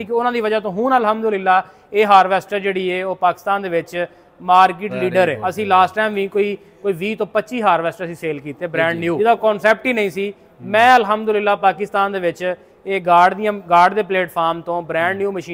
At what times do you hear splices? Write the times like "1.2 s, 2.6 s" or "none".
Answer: 5.4 s, 9.2 s